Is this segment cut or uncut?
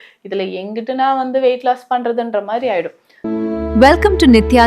cut